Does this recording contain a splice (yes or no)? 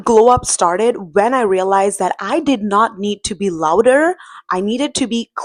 no